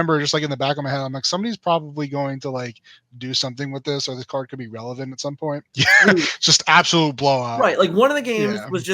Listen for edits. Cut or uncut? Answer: cut